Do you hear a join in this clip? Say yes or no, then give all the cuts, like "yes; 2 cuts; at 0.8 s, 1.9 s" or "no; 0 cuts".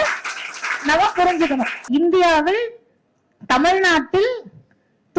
yes; 1 cut; at 1.8 s